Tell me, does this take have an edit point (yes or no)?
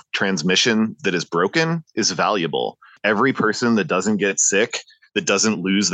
yes